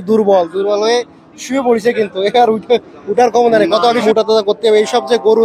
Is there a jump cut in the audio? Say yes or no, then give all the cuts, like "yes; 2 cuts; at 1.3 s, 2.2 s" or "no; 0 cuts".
yes; 1 cut; at 4.0 s